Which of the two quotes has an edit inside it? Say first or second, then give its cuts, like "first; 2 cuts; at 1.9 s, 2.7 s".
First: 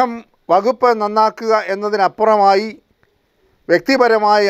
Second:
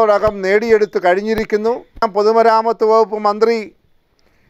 second; 1 cut; at 2.1 s